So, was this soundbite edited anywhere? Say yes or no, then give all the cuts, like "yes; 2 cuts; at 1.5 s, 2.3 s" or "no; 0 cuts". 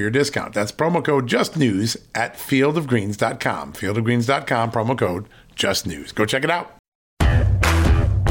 yes; 1 cut; at 7.1 s